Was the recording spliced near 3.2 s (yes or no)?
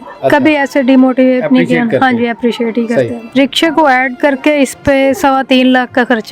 yes